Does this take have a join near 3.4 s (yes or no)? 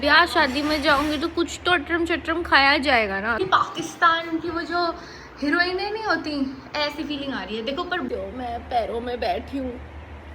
yes